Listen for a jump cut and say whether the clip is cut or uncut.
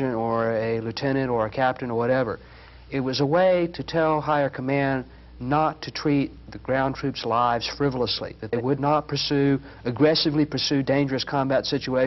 uncut